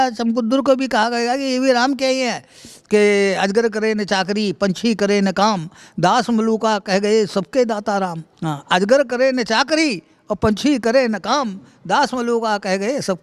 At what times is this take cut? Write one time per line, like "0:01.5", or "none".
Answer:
0:08.3